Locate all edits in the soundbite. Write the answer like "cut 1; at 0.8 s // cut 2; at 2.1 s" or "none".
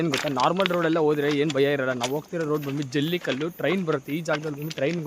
none